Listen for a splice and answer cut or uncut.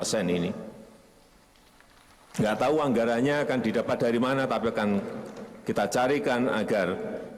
uncut